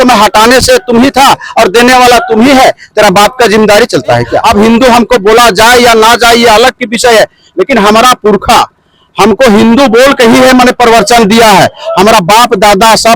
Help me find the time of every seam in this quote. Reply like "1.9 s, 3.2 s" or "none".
4.4 s